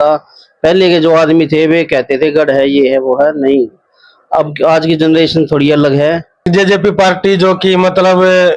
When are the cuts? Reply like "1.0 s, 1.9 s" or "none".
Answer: 6.5 s